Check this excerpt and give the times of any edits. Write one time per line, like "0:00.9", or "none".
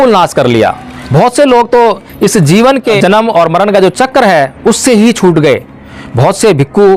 0:03.0